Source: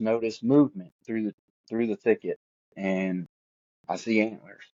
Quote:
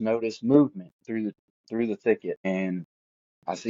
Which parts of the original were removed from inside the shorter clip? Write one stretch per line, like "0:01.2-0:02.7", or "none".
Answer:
0:02.8-0:03.2